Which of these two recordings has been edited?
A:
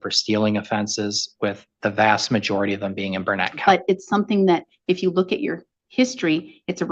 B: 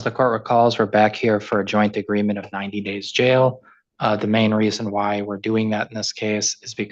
A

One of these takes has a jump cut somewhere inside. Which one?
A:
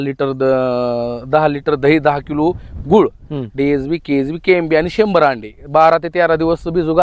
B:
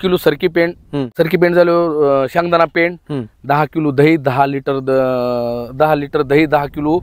B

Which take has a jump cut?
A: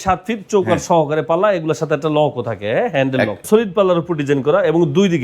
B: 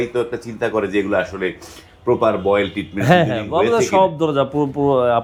A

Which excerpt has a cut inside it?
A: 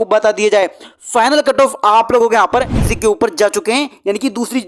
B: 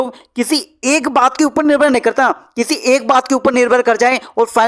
A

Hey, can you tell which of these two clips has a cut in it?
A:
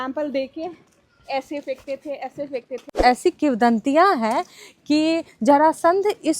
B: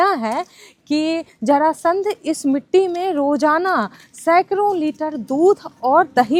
A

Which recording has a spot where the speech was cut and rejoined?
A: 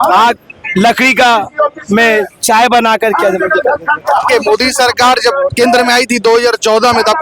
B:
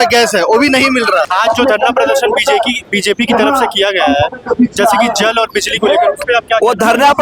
B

